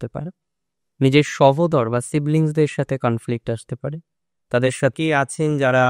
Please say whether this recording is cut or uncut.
cut